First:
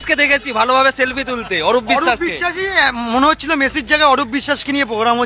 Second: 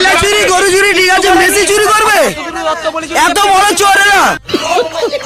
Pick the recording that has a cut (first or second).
first